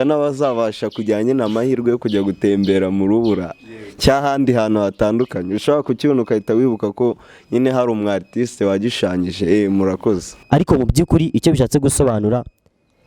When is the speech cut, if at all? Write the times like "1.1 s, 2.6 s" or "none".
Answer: 10.3 s